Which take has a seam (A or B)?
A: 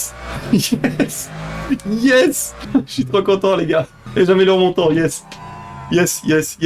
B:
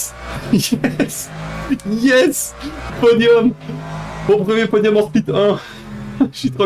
A